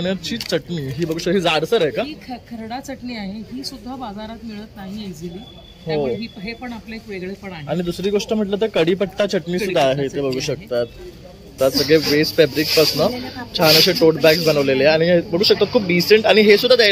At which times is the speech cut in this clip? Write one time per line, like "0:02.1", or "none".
0:11.6